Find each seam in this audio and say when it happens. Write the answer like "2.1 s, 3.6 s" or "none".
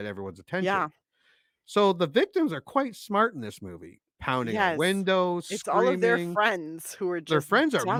none